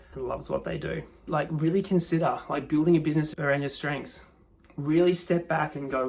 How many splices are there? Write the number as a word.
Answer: two